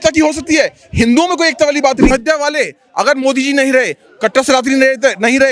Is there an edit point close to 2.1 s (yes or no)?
yes